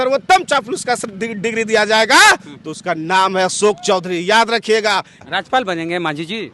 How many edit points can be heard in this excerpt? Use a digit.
1